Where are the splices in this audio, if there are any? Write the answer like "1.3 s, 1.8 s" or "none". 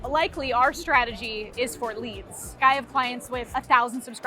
2.6 s